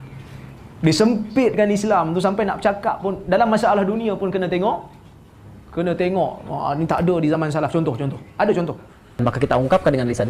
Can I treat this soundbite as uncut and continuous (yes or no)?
no